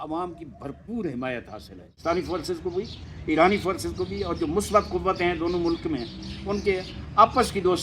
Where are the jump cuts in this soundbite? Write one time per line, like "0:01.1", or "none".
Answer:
0:02.0